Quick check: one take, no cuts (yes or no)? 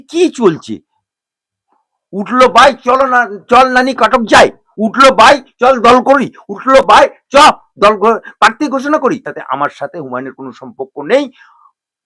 no